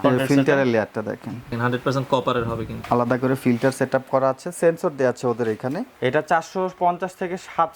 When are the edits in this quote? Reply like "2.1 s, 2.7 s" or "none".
1.6 s, 2.7 s, 5.9 s